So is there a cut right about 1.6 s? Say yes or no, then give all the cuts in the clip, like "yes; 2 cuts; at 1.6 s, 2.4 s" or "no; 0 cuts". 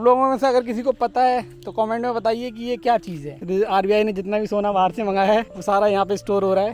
no; 2 cuts; at 3.4 s, 5.5 s